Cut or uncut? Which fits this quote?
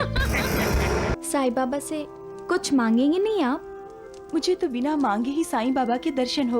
cut